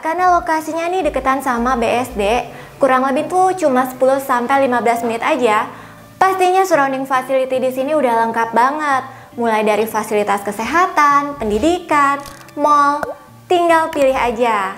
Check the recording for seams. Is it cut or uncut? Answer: uncut